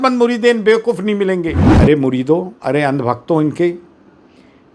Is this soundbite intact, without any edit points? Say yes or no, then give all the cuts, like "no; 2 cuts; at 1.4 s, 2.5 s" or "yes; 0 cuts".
no; 1 cut; at 1.7 s